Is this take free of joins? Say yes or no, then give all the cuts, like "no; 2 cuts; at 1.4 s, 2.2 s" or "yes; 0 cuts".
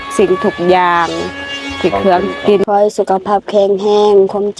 no; 1 cut; at 2.6 s